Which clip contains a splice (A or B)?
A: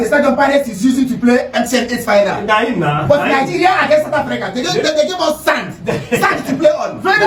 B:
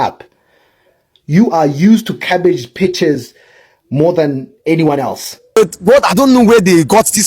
B